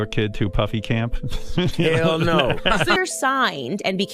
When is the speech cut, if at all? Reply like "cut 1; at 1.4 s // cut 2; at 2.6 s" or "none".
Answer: cut 1; at 3.0 s